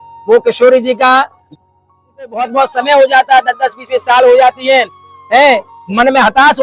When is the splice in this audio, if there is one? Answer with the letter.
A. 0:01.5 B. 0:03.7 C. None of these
A